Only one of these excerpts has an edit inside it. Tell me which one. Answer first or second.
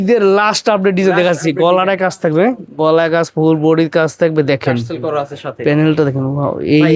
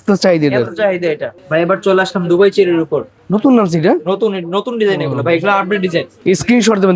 second